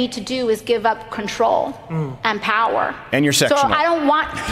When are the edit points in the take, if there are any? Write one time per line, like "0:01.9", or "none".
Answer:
none